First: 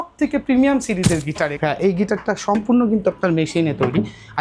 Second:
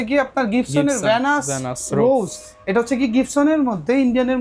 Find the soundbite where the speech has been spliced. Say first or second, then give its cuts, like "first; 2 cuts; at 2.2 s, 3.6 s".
first; 1 cut; at 1.6 s